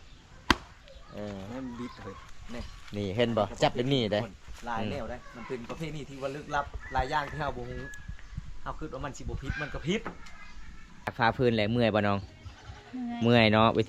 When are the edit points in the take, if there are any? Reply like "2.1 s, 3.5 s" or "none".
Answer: 2.3 s, 11.1 s